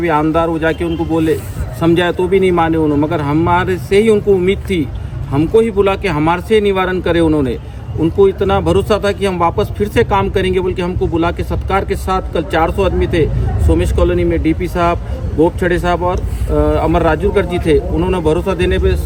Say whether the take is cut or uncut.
uncut